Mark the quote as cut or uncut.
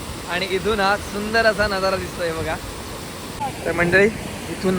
cut